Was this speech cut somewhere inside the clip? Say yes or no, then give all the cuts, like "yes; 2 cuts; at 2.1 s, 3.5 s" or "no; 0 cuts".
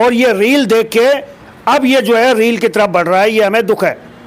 no; 0 cuts